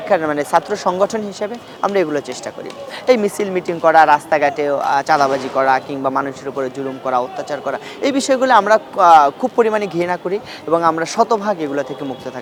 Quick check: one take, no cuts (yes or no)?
yes